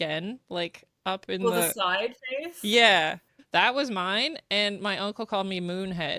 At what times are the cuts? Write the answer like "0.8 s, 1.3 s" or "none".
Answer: 3.3 s